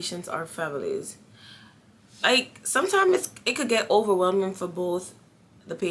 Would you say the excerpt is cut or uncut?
uncut